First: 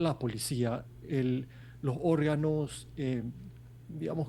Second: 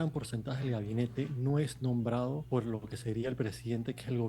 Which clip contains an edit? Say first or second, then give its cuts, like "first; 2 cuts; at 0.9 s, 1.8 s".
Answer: second; 1 cut; at 2.4 s